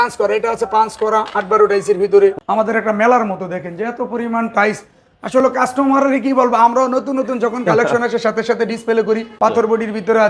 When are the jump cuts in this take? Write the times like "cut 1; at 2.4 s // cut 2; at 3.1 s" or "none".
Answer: cut 1; at 2.4 s // cut 2; at 9.3 s